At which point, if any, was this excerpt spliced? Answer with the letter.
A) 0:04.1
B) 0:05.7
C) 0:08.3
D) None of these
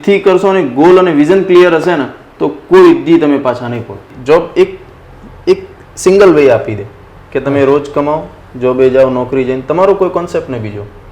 A